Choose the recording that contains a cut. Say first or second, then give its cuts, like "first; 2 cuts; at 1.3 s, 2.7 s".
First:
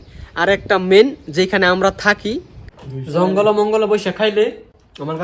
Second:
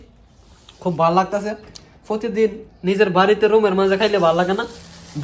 first; 1 cut; at 2.6 s